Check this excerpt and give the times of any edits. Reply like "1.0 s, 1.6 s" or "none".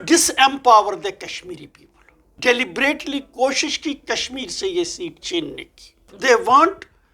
2.4 s, 6.1 s